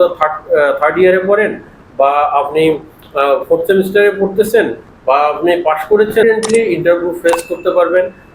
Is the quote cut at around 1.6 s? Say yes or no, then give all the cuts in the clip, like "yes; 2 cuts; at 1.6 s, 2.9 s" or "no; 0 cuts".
no; 1 cut; at 6.2 s